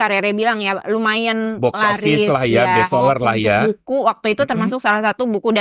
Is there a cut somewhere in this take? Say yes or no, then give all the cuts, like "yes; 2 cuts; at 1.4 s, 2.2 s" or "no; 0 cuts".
no; 0 cuts